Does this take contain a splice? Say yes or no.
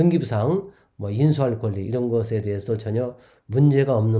no